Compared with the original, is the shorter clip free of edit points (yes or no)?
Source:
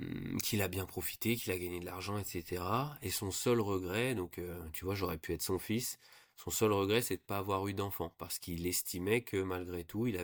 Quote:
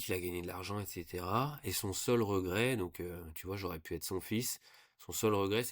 yes